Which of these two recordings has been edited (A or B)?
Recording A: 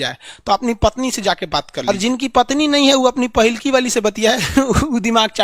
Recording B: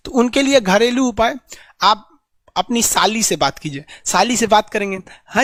A